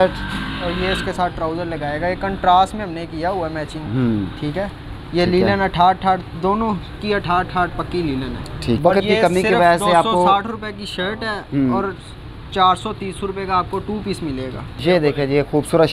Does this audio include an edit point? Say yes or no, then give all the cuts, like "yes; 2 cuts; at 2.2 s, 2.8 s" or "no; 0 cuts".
yes; 2 cuts; at 8.8 s, 14.8 s